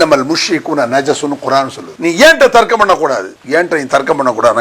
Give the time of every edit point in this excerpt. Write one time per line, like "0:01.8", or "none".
0:01.9
0:03.3